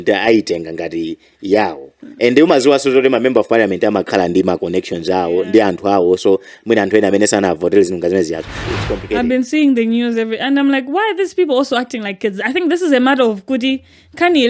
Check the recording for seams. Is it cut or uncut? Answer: cut